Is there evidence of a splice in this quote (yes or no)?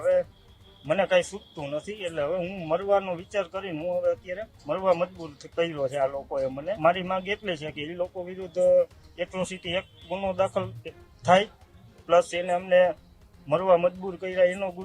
yes